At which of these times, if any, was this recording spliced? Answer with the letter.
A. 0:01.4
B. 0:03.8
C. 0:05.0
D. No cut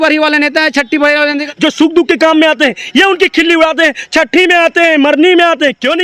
A